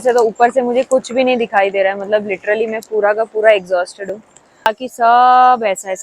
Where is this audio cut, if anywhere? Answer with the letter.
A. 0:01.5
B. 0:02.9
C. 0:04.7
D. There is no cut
C